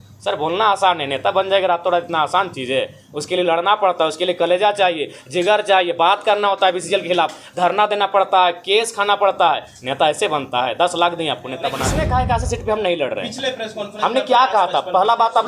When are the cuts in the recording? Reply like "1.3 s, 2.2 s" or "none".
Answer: 11.8 s